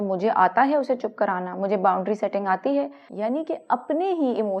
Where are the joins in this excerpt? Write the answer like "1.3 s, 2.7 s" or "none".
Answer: 3.0 s